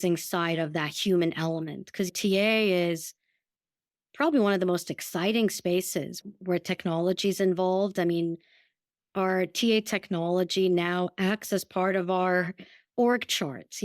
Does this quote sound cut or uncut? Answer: cut